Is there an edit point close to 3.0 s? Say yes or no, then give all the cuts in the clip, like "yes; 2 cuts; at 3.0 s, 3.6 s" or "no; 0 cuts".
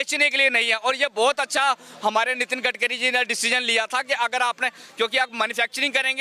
no; 0 cuts